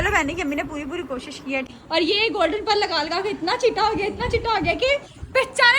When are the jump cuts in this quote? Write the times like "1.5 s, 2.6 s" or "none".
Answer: 1.7 s